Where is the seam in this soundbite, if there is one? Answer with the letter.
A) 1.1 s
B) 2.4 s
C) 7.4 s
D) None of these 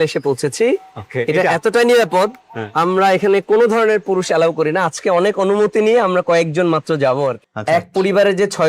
C